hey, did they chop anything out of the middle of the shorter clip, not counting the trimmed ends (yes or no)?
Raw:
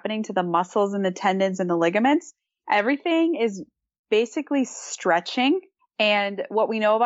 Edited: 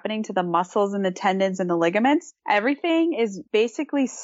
yes